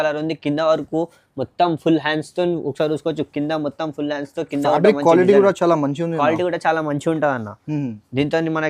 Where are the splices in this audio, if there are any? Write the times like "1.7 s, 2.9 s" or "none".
none